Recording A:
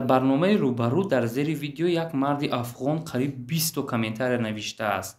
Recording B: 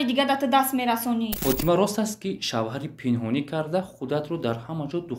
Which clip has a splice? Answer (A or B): B